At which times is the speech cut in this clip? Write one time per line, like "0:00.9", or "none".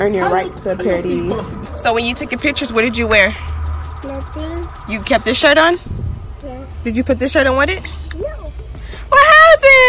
0:01.6

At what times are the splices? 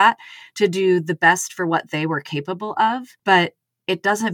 0:03.1

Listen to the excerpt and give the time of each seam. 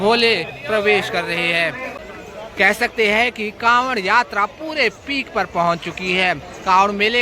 0:02.0

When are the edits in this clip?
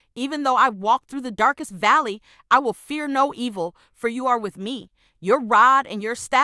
none

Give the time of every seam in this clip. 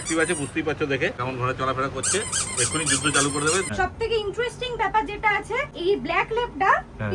0:01.2
0:03.7
0:05.7

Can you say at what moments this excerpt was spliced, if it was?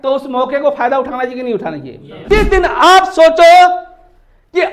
0:02.1

